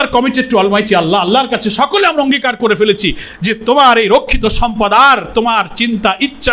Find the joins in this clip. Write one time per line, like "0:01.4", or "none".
none